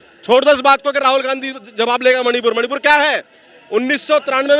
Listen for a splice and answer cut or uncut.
uncut